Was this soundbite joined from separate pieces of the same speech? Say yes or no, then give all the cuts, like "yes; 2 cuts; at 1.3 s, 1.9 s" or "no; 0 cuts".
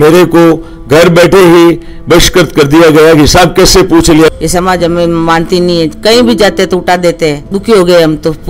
yes; 2 cuts; at 4.3 s, 7.5 s